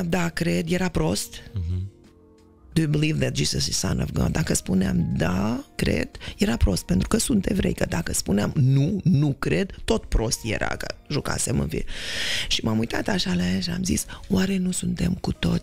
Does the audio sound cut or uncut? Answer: uncut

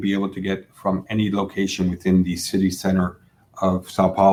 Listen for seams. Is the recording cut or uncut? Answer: uncut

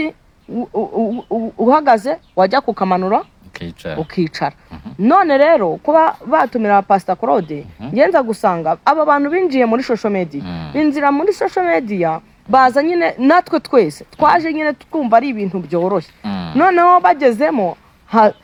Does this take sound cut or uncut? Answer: uncut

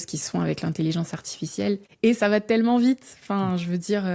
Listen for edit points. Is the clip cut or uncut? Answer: uncut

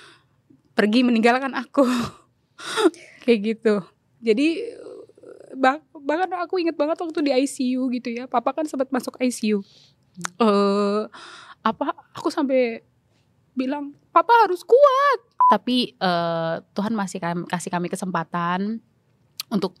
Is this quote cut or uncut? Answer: cut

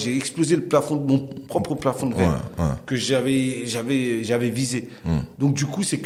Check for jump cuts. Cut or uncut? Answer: uncut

